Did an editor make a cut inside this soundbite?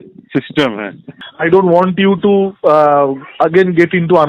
yes; 1 cut; at 1.1 s

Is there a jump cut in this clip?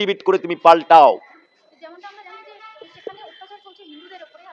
no; 0 cuts

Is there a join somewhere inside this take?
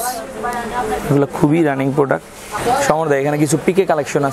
yes; 1 cut; at 2.6 s

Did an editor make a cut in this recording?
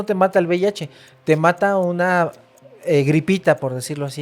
no; 0 cuts

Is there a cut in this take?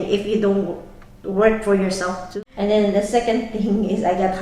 yes; 1 cut; at 2.3 s

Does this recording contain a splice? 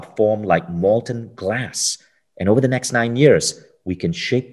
no; 0 cuts

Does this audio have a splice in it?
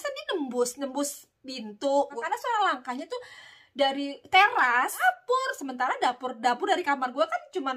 yes; 2 cuts; at 2.2 s, 5.0 s

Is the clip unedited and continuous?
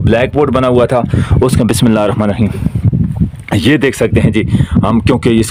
yes; 0 cuts

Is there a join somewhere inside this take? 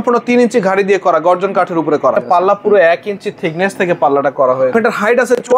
yes; 2 cuts; at 2.2 s, 4.7 s

